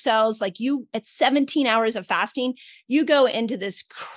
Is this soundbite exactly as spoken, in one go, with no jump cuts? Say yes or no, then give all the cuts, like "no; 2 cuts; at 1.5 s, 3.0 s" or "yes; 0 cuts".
yes; 0 cuts